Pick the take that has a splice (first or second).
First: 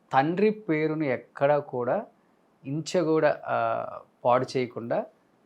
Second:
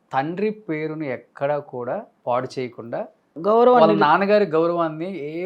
second